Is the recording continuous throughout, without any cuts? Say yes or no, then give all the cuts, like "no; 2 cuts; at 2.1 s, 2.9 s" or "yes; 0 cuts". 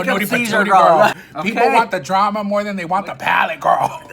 no; 1 cut; at 1.2 s